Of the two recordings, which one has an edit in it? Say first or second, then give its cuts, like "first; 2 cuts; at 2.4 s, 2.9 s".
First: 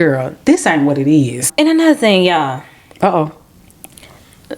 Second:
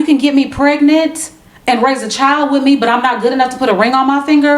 first; 1 cut; at 1.4 s